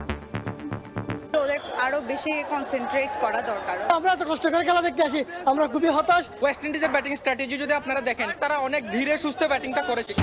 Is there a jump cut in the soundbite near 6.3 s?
yes; 3 cuts; at 1.2 s, 3.9 s, 6.3 s

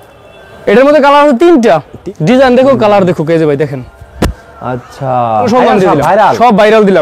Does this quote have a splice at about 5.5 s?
yes; 2 cuts; at 2.0 s, 5.5 s

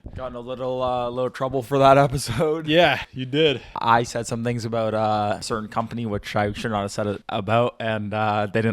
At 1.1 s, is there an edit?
no; 3 cuts; at 3.5 s, 5.4 s, 7.2 s

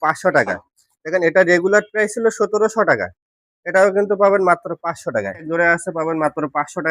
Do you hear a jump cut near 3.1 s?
no; 1 cut; at 5.5 s

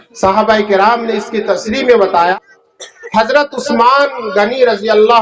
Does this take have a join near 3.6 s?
no; 1 cut; at 2.4 s

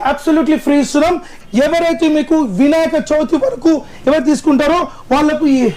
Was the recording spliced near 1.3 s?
yes; 1 cut; at 1.3 s

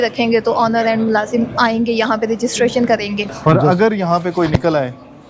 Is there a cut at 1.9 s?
no; 1 cut; at 3.3 s

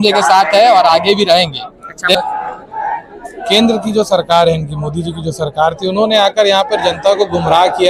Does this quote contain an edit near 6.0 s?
no; 1 cut; at 2.2 s

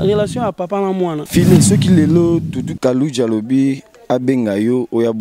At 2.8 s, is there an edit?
no; 1 cut; at 1.2 s

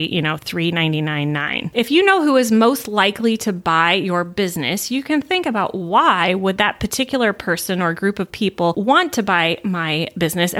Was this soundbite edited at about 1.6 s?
yes; 1 cut; at 1.6 s

